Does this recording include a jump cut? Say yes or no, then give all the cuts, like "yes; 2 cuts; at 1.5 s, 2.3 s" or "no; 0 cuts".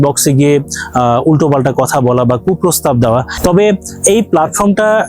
yes; 1 cut; at 3.3 s